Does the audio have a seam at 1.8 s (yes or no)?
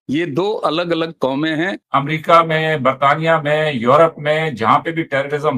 yes